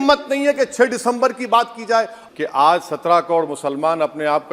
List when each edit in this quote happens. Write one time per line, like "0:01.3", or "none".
0:02.2